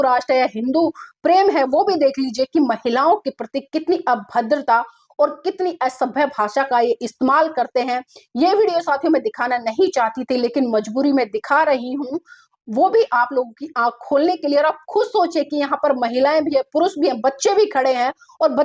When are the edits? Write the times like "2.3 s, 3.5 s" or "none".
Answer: none